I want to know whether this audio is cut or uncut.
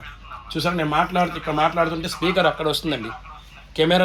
uncut